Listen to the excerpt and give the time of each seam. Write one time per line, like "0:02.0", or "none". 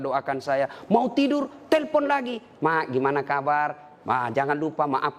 none